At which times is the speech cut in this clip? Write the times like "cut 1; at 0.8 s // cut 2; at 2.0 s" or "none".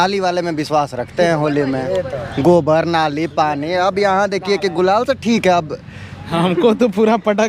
cut 1; at 6.2 s